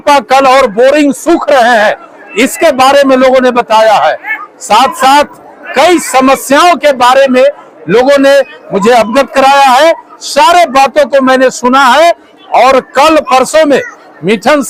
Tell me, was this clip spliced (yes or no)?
no